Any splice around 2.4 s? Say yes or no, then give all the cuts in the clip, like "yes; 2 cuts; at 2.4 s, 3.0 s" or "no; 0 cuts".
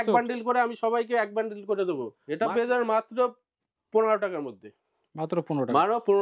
yes; 1 cut; at 2.4 s